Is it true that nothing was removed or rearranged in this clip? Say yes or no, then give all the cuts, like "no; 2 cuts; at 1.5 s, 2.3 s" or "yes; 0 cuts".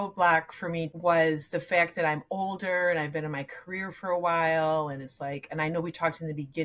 no; 1 cut; at 0.9 s